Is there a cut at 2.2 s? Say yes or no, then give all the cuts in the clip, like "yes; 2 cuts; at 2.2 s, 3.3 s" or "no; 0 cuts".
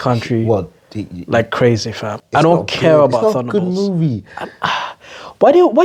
yes; 1 cut; at 2.2 s